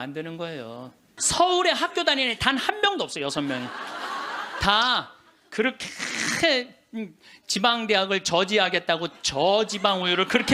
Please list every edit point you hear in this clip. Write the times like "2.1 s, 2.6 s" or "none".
1.1 s